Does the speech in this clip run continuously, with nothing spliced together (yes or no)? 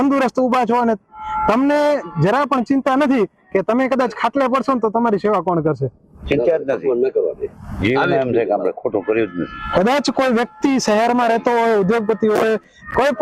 yes